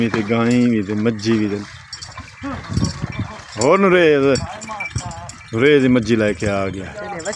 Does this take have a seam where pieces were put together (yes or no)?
no